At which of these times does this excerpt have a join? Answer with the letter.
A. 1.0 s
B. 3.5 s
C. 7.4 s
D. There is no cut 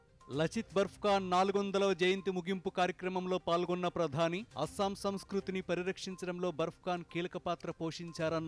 D